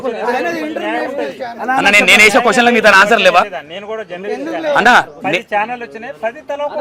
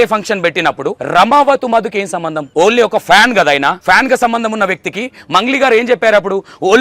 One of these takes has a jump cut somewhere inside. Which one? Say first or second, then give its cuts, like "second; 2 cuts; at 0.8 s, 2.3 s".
second; 3 cuts; at 1.0 s, 2.4 s, 3.8 s